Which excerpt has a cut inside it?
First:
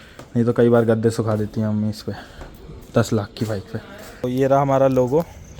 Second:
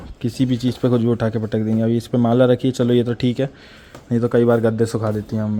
first; 1 cut; at 4.2 s

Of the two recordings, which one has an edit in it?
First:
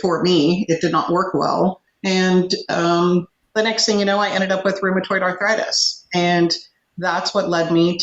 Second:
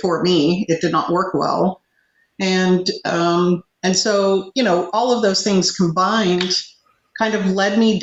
first; 2 cuts; at 1.9 s, 3.4 s

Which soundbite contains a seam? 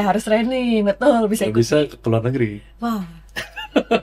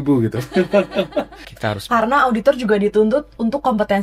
second; 1 cut; at 1.4 s

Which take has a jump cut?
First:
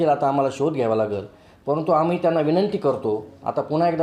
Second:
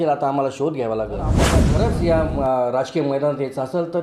second; 1 cut; at 1.6 s

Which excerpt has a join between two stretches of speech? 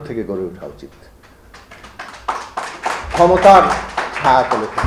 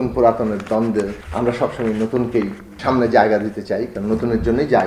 second; 2 cuts; at 1.2 s, 2.7 s

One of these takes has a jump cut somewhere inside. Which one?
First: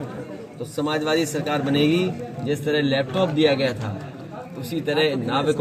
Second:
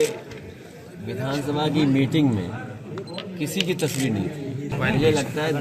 second; 1 cut; at 4.7 s

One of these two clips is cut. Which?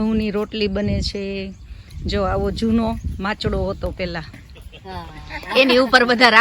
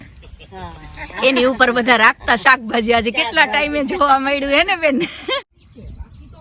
second; 1 cut; at 5.4 s

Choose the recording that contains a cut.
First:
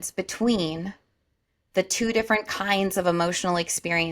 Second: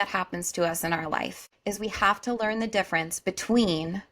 second; 1 cut; at 1.4 s

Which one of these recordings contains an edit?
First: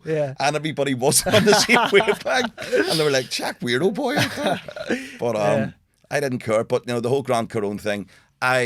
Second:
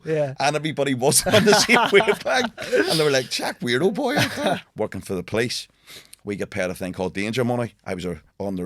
second; 1 cut; at 4.7 s

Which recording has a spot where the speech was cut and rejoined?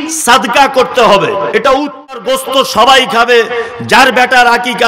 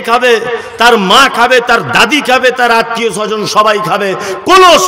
first; 1 cut; at 2.2 s

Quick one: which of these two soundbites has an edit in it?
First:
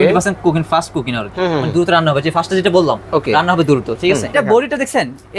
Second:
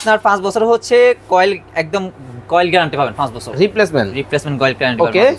first; 1 cut; at 4.3 s

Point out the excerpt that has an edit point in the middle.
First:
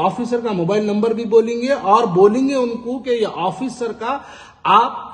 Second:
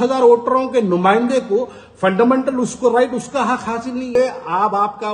second; 1 cut; at 4.1 s

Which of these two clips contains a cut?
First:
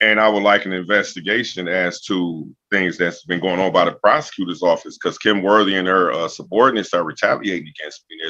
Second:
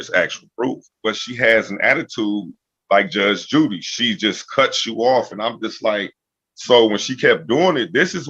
second; 1 cut; at 1.0 s

